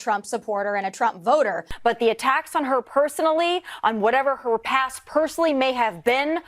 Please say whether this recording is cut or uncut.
cut